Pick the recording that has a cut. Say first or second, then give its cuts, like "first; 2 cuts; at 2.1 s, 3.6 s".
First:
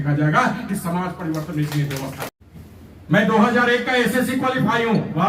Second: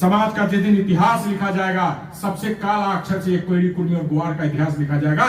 first; 1 cut; at 2.2 s